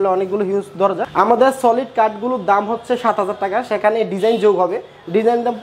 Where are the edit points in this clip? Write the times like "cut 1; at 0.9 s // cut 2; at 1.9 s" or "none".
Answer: cut 1; at 1.0 s